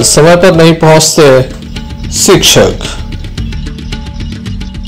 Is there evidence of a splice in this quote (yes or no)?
no